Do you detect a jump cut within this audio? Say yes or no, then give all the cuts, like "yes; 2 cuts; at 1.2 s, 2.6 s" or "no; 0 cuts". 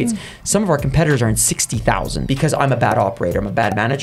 yes; 1 cut; at 2.2 s